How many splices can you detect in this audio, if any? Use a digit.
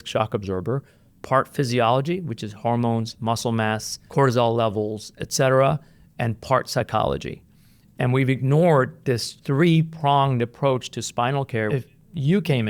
3